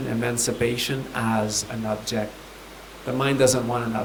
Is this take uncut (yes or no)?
yes